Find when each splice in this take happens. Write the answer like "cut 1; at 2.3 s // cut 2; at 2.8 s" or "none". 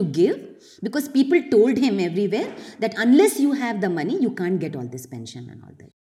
none